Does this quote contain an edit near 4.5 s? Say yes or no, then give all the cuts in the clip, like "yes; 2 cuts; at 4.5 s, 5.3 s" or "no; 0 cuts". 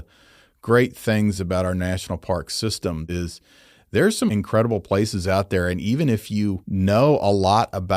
no; 2 cuts; at 2.9 s, 6.6 s